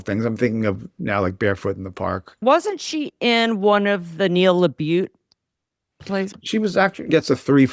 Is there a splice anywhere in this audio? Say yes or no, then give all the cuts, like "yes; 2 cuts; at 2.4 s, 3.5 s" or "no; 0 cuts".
yes; 2 cuts; at 2.4 s, 6.3 s